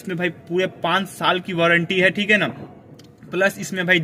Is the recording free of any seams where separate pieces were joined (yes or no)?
yes